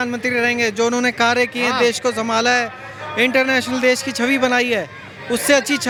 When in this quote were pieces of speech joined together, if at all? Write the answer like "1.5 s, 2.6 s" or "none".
none

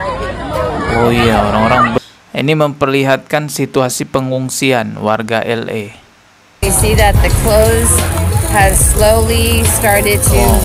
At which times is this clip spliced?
2.0 s

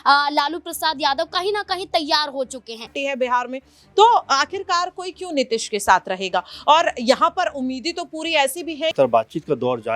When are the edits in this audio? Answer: 2.9 s, 8.9 s

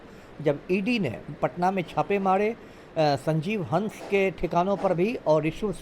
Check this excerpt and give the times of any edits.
1.3 s

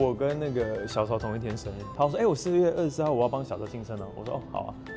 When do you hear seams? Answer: 1.8 s

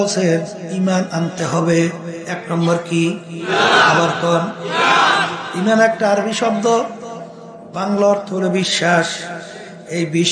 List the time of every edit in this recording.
none

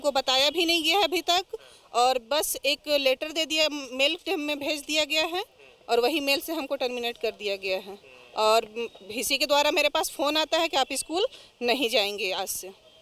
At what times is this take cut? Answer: none

